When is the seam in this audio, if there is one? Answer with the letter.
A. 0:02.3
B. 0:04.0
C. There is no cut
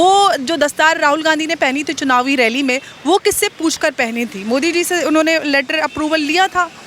C